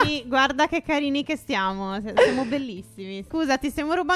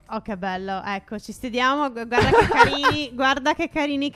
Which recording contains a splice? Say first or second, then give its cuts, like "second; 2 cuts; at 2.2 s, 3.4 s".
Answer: first; 1 cut; at 3.2 s